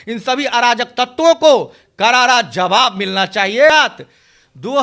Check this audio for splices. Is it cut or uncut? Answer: cut